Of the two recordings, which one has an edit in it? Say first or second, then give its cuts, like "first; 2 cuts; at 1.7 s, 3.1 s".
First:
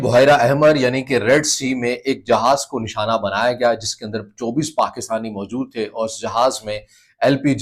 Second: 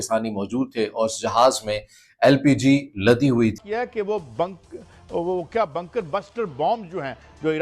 second; 1 cut; at 3.6 s